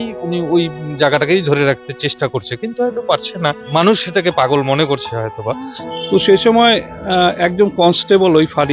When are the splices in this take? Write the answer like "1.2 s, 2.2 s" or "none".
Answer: 3.6 s, 5.7 s